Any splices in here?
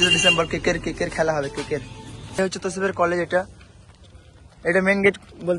yes; 1 cut; at 2.4 s

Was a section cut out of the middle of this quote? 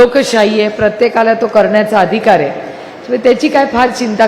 no; 0 cuts

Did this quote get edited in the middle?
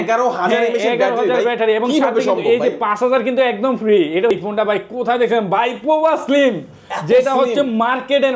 yes; 1 cut; at 4.3 s

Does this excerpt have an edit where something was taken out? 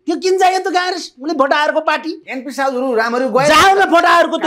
no; 0 cuts

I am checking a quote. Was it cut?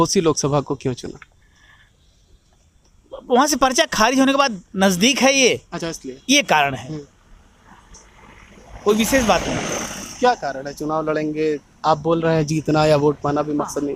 no; 0 cuts

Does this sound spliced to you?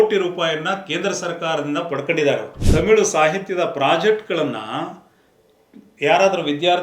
yes; 1 cut; at 2.6 s

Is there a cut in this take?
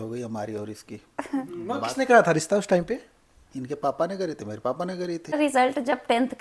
yes; 1 cut; at 5.3 s

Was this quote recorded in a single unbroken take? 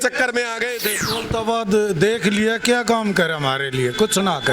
no; 1 cut; at 0.9 s

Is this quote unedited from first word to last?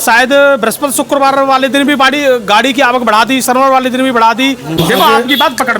no; 1 cut; at 4.8 s

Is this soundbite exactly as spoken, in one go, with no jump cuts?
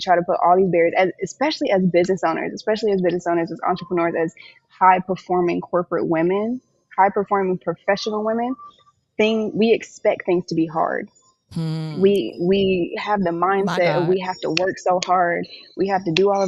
yes; 0 cuts

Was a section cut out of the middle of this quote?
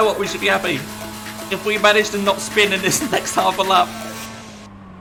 no; 0 cuts

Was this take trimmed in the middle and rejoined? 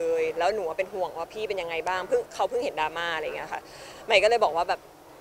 no; 0 cuts

